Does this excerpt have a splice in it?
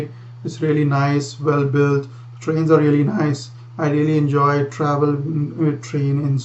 no; 0 cuts

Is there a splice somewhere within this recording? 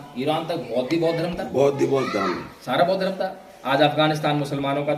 no; 0 cuts

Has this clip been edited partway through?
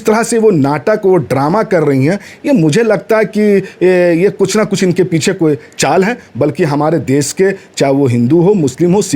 no; 0 cuts

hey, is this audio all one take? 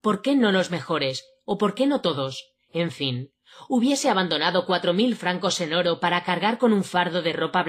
no; 1 cut; at 4.3 s

